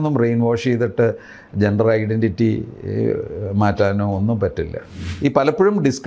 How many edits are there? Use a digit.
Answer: 1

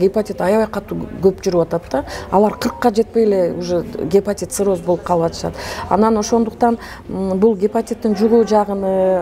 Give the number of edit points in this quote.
0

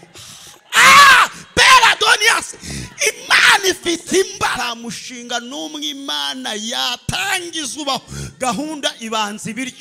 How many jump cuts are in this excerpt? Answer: 1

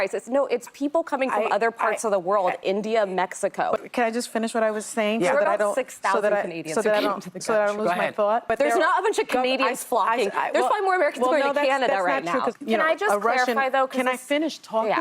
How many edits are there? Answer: 3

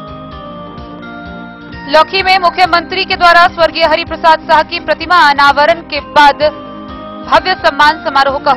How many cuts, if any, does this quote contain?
1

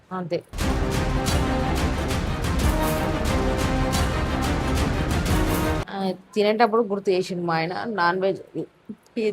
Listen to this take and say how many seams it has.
1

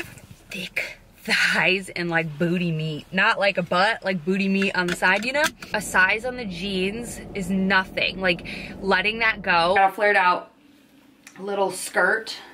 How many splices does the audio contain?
2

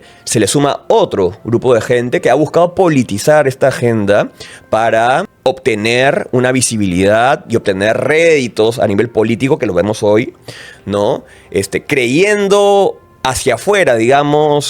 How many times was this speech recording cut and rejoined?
1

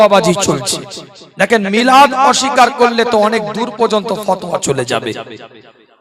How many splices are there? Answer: 0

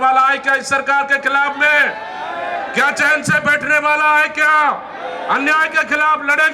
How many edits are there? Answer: 0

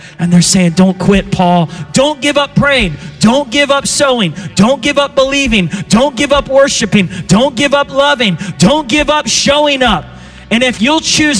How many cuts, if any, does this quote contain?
1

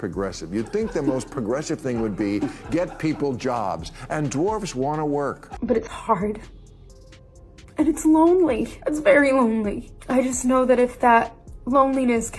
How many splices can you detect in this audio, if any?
1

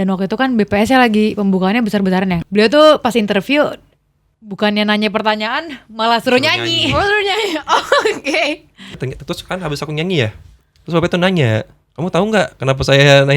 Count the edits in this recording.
2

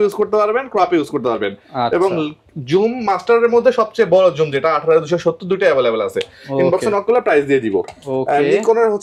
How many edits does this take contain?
0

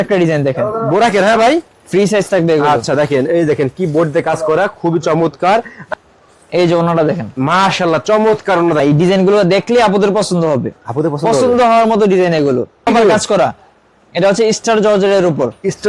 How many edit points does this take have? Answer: 3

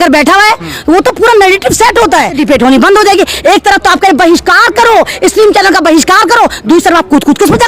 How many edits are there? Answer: 1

